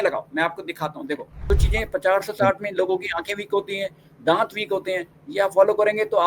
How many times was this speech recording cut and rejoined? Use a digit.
1